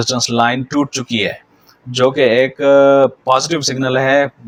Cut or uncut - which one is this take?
uncut